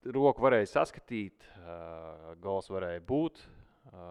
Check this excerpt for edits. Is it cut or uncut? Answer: uncut